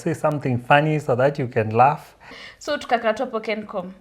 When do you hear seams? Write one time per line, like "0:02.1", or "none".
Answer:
0:02.3